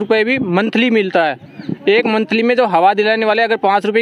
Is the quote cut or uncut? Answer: uncut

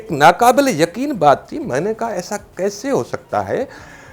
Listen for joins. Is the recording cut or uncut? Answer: uncut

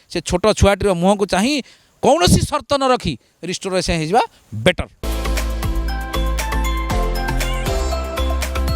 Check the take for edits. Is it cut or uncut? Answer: uncut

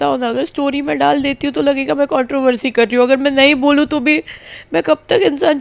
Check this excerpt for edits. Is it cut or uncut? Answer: uncut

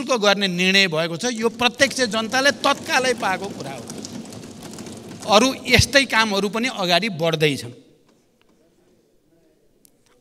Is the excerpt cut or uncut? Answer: uncut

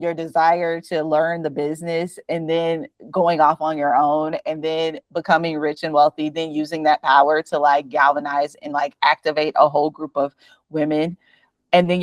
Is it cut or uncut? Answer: uncut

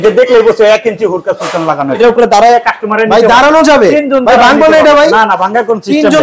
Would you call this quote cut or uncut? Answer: cut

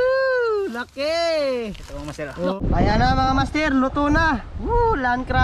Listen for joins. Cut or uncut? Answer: cut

